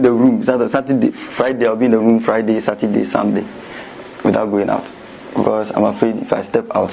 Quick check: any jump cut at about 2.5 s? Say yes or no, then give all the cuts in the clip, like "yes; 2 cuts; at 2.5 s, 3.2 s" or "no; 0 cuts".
yes; 1 cut; at 2.5 s